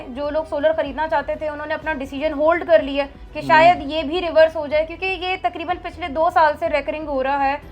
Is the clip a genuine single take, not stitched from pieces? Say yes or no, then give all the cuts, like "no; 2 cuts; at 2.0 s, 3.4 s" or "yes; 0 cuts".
yes; 0 cuts